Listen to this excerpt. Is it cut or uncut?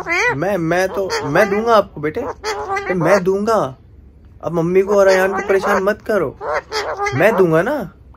uncut